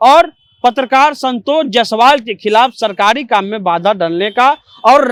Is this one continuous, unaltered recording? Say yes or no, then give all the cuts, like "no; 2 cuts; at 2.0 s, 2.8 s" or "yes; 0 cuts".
yes; 0 cuts